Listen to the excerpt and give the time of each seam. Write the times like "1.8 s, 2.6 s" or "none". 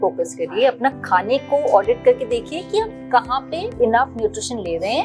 3.7 s